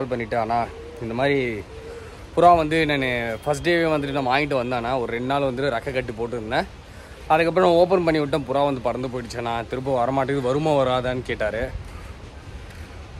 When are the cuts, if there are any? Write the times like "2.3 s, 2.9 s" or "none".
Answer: none